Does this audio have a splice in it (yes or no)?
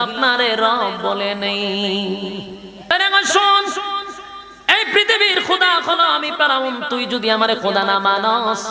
yes